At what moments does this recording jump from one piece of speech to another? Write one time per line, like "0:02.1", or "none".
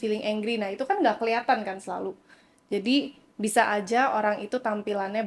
none